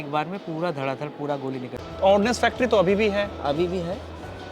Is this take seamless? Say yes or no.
no